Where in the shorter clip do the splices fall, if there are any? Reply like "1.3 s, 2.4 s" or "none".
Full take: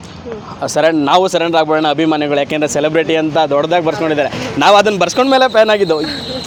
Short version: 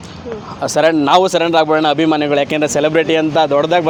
none